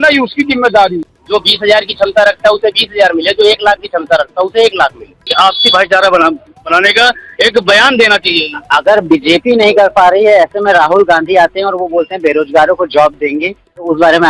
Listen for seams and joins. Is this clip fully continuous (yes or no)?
no